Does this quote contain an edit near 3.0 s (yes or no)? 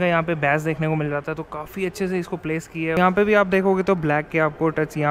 yes